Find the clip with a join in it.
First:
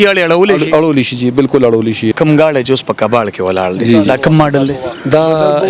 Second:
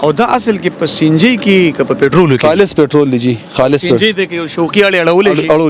first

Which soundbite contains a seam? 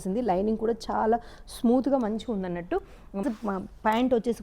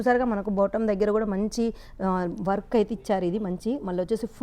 first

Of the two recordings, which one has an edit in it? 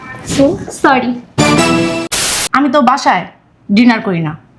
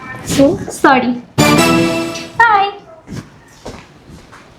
first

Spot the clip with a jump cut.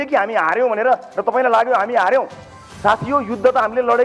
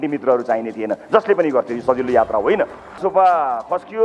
second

